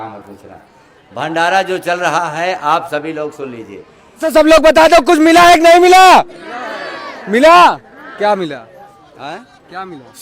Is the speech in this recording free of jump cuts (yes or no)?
no